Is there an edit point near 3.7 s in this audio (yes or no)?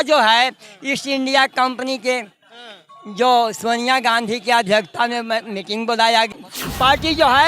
no